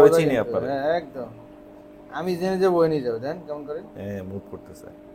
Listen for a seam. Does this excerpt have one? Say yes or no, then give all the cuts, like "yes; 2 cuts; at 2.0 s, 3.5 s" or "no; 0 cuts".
no; 0 cuts